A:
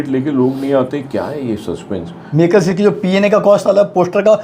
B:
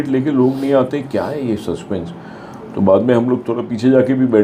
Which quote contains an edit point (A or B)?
A